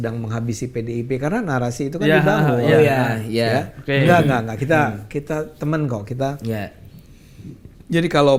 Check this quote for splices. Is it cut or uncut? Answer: uncut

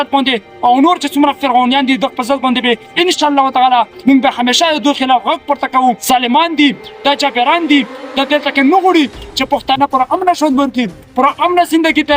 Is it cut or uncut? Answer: cut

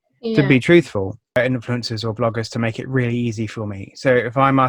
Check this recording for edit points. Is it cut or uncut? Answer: cut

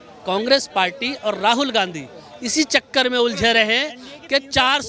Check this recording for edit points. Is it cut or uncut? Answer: uncut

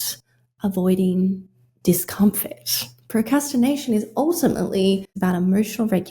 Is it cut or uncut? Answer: cut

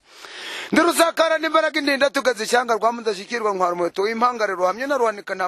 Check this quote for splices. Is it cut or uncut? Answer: uncut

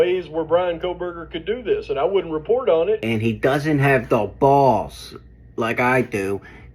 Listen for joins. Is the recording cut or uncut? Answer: cut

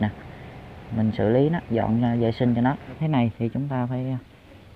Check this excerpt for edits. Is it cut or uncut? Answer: cut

